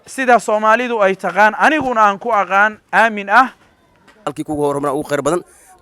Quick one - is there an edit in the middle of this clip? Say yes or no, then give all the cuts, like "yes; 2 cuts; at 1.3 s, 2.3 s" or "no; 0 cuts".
yes; 1 cut; at 4.4 s